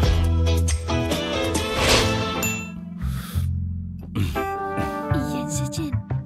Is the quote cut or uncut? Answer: cut